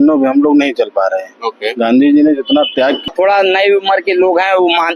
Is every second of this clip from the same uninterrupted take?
no; 1 cut; at 3.1 s

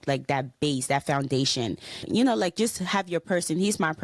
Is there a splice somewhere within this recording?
no; 0 cuts

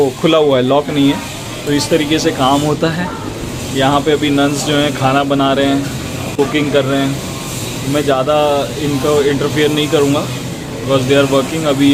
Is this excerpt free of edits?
yes; 0 cuts

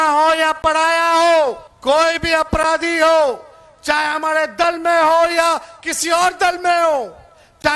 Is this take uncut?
no; 1 cut; at 1.7 s

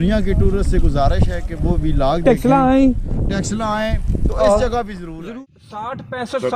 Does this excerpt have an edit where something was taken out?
yes; 1 cut; at 5.0 s

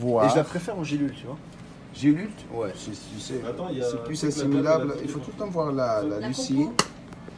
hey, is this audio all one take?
yes; 0 cuts

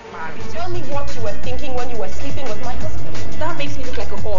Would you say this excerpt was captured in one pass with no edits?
yes; 0 cuts

